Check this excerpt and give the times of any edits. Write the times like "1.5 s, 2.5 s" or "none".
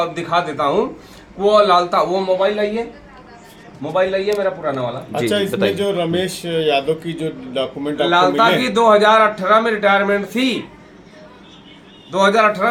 none

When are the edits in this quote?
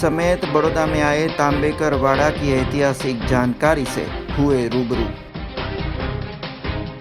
none

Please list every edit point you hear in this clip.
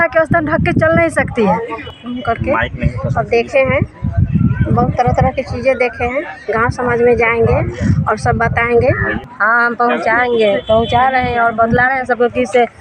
1.7 s, 9.1 s

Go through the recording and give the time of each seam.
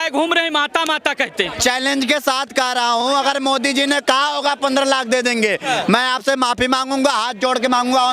1.5 s

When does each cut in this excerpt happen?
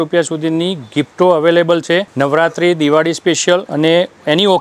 2.1 s, 3.7 s

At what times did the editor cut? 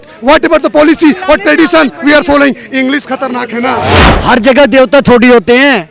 4.0 s

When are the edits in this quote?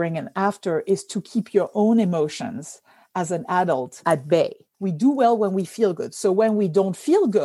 4.7 s

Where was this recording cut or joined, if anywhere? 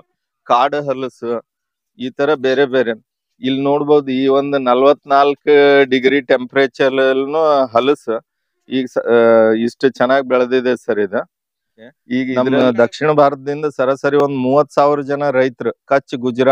12.0 s

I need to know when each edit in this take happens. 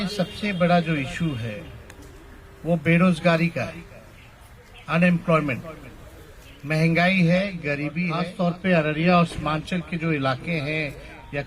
8.0 s

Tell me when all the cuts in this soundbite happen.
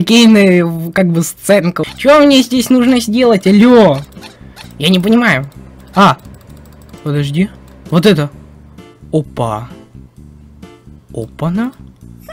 1.8 s

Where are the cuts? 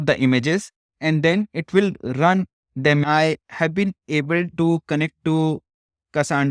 3.0 s

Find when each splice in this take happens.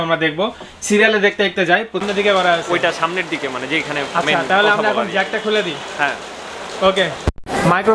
2.0 s

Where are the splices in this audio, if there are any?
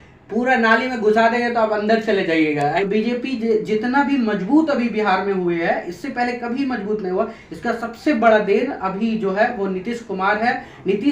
2.8 s

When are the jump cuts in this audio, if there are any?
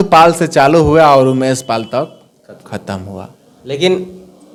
none

